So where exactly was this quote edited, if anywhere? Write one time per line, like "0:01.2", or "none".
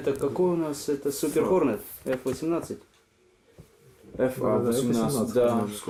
none